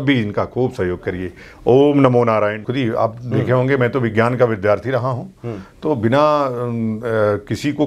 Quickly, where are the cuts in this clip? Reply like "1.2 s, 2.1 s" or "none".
2.6 s